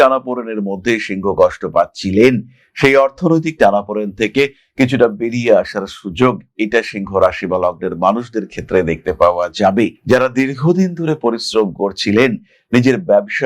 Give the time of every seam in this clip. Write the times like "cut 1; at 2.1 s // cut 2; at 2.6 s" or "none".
cut 1; at 10.0 s

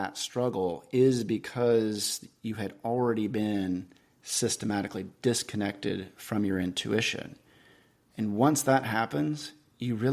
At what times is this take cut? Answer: none

